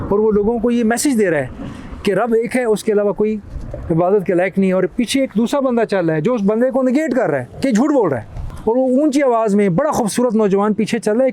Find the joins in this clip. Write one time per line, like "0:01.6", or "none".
none